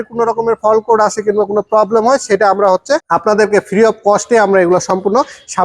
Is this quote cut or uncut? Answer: cut